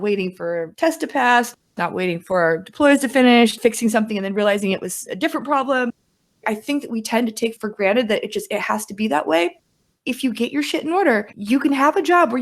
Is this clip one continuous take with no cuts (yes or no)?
no